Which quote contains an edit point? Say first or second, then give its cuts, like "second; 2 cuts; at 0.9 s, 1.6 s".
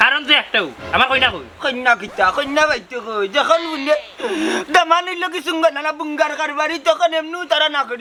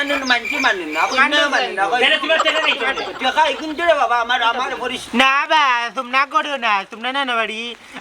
second; 1 cut; at 5.1 s